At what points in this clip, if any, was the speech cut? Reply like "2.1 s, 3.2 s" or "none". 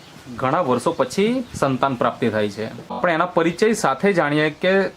3.0 s